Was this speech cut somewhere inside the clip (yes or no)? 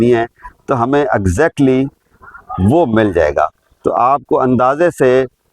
no